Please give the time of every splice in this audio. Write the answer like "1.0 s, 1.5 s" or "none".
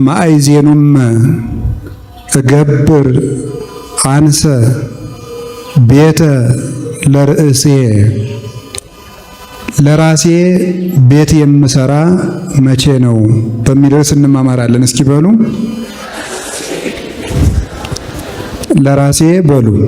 none